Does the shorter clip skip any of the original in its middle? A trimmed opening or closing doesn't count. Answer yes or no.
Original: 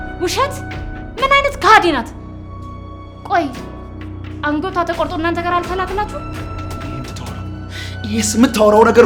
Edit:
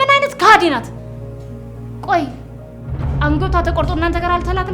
no